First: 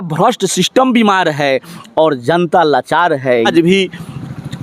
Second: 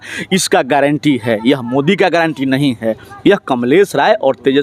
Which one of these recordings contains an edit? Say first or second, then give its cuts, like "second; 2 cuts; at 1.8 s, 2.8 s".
first; 1 cut; at 3.5 s